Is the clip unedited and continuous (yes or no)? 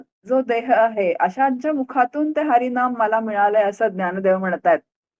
yes